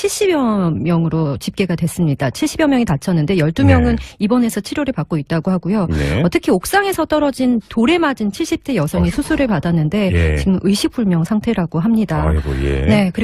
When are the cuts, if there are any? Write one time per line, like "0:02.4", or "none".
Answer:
0:12.1